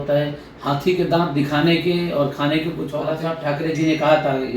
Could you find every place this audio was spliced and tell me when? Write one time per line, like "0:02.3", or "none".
0:03.3